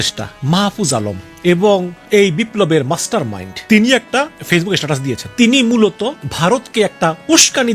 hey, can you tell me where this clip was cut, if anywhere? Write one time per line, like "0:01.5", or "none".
0:01.2
0:01.9
0:03.5
0:04.1
0:05.2
0:06.2